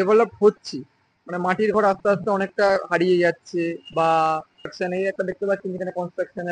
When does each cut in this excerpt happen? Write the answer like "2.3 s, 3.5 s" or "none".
4.5 s

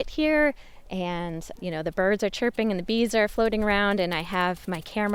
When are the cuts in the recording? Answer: none

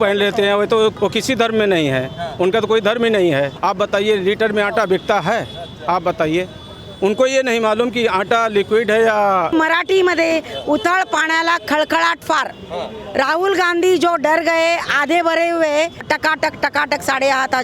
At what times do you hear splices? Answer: 1.0 s, 3.5 s, 9.5 s, 16.0 s

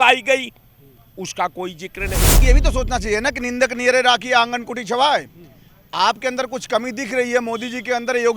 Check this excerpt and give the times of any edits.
2.4 s

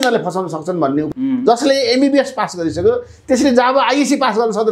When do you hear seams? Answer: 1.1 s

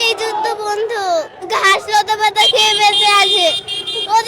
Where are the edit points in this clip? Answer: 1.4 s

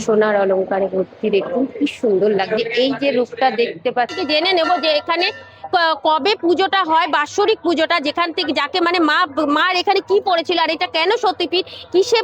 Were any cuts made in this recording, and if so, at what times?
4.1 s

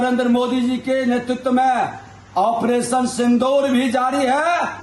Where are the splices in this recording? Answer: none

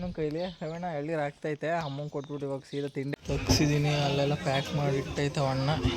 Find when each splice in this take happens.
3.1 s

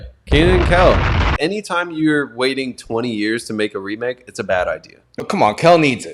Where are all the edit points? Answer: 1.3 s, 5.1 s

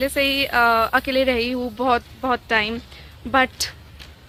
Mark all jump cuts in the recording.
none

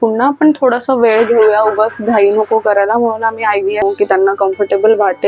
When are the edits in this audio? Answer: 3.8 s

